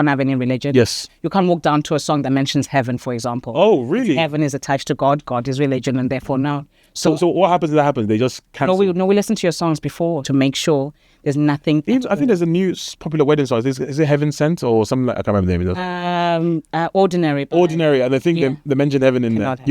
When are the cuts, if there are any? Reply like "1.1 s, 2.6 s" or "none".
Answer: 1.1 s, 10.2 s